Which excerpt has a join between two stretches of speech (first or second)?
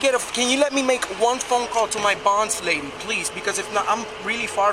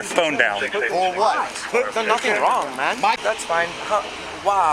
second